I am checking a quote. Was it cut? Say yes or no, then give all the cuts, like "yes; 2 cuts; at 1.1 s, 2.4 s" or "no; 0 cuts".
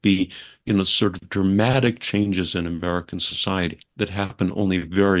no; 0 cuts